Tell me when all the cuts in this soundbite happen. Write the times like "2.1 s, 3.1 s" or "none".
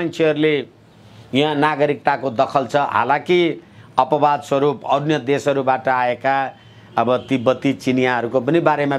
none